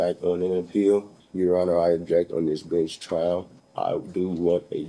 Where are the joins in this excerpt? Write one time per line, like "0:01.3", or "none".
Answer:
0:01.2
0:03.6